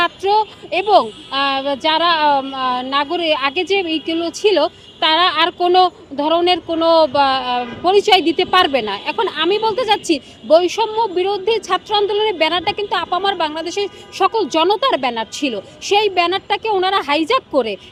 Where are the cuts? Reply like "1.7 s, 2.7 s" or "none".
none